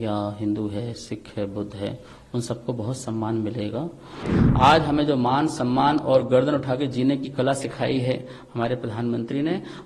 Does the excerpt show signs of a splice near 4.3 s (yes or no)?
yes